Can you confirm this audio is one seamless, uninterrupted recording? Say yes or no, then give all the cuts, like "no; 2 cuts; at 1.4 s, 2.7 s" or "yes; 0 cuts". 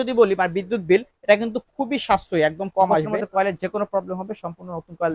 no; 1 cut; at 3.2 s